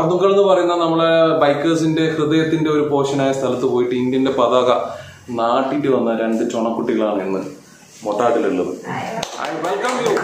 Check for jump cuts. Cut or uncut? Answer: uncut